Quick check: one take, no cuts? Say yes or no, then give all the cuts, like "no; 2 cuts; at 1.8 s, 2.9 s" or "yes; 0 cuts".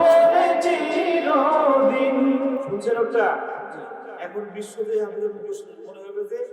no; 1 cut; at 2.6 s